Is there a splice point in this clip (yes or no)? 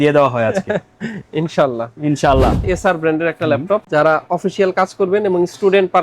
yes